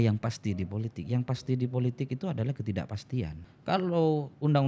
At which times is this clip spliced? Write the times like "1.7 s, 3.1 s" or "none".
3.5 s